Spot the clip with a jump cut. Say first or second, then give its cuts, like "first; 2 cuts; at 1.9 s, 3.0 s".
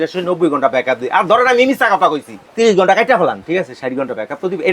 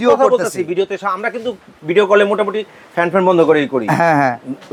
first; 1 cut; at 2.4 s